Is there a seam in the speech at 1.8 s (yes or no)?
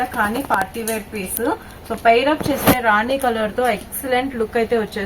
no